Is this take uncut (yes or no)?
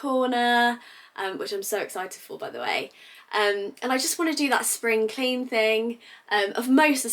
yes